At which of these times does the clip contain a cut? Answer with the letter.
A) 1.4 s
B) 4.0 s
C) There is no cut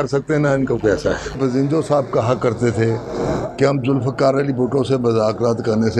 A